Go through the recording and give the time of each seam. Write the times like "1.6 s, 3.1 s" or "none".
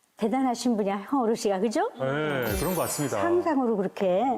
none